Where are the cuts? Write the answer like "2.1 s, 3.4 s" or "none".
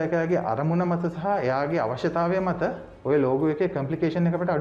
none